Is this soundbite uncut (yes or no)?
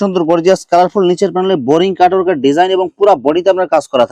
yes